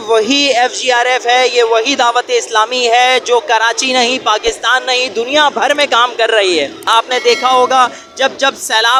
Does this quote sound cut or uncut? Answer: uncut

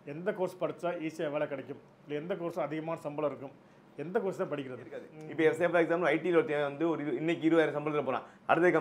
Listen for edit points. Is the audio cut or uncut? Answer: cut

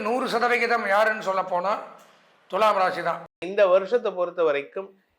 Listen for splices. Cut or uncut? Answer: cut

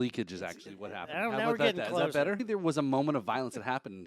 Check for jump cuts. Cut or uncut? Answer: cut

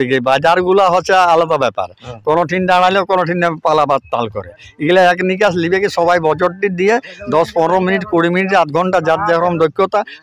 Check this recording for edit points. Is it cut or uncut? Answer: uncut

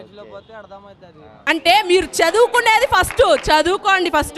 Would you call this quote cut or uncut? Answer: cut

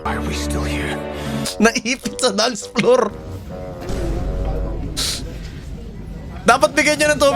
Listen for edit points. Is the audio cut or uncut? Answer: uncut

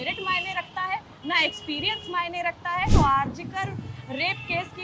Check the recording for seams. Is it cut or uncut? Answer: cut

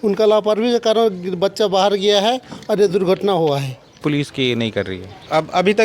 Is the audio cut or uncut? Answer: cut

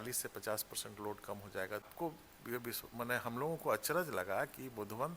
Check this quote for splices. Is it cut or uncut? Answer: cut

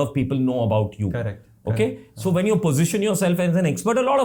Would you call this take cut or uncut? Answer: uncut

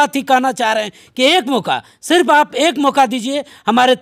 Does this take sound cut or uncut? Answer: uncut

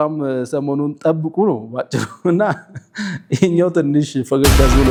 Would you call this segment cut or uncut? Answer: uncut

